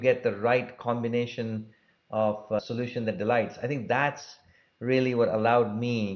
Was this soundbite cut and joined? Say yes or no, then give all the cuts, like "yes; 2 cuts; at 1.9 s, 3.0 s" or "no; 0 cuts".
yes; 1 cut; at 2.6 s